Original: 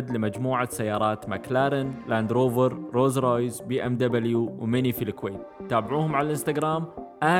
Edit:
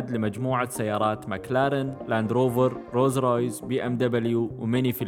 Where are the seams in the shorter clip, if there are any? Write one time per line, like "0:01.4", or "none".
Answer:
none